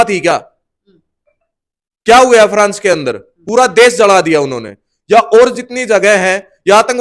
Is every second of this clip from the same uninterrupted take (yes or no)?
yes